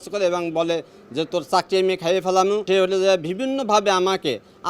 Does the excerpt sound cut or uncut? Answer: cut